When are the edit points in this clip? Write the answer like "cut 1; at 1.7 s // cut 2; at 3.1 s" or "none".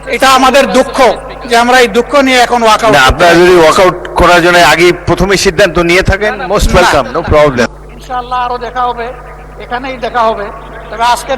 cut 1; at 7.7 s